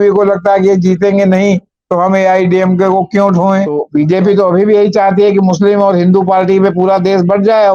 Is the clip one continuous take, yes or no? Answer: no